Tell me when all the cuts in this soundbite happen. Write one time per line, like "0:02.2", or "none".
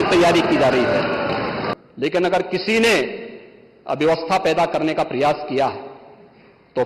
0:01.7